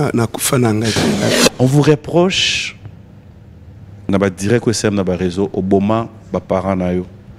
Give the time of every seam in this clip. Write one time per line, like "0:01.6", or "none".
0:01.3